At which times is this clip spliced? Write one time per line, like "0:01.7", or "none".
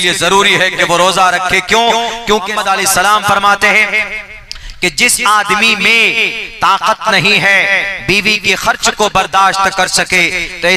0:02.6